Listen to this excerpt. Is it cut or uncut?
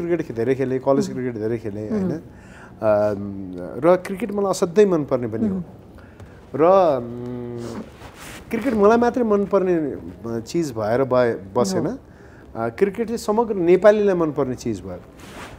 uncut